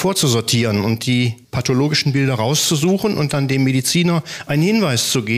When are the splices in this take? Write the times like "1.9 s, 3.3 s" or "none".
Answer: none